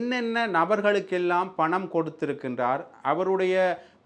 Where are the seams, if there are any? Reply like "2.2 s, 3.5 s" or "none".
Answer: none

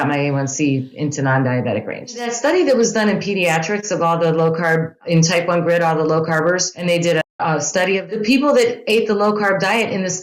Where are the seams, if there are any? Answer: 2.2 s, 5.0 s, 6.7 s, 8.1 s

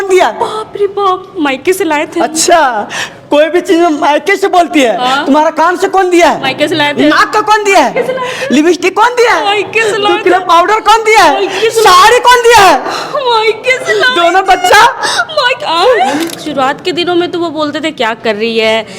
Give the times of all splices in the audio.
16.4 s

